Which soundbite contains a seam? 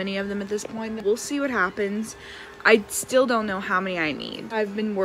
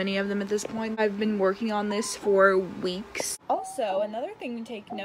second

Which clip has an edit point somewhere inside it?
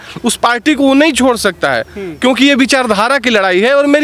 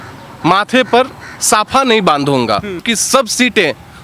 second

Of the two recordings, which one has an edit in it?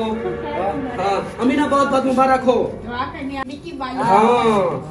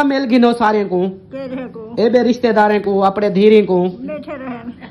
first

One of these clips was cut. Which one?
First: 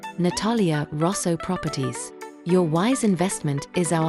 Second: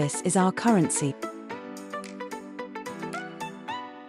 second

